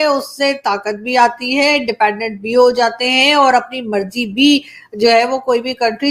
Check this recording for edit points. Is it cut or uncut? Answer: uncut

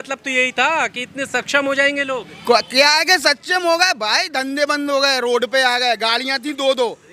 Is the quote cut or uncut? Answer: uncut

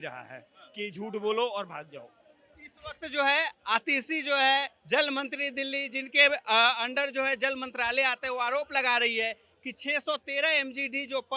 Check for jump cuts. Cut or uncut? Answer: uncut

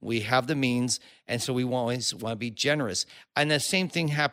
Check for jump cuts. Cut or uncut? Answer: uncut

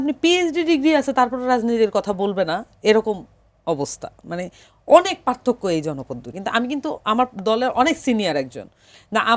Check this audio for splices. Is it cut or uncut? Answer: cut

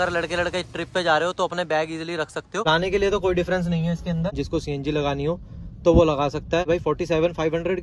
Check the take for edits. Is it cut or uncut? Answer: cut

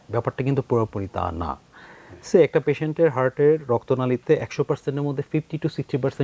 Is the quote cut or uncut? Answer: uncut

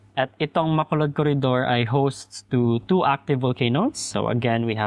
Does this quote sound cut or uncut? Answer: uncut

